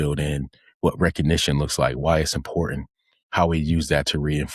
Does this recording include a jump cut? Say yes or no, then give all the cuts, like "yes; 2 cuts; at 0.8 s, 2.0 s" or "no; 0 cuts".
no; 0 cuts